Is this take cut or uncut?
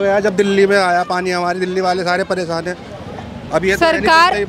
uncut